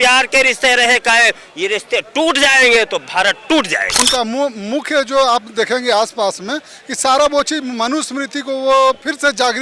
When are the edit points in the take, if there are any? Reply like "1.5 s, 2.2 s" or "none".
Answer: 3.9 s